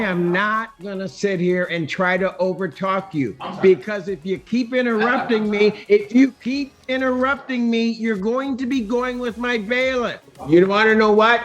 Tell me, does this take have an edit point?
yes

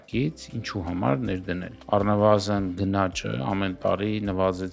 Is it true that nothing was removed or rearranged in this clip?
no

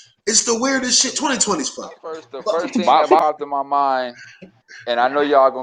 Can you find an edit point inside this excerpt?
yes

